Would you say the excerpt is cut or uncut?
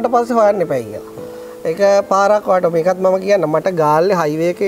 uncut